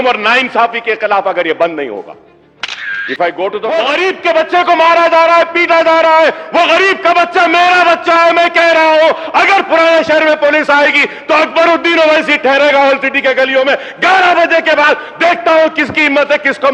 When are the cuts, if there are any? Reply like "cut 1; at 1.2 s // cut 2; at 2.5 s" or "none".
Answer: cut 1; at 3.7 s